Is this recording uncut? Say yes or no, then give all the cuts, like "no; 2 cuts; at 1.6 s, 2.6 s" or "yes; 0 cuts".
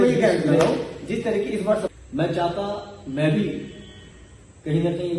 no; 1 cut; at 1.9 s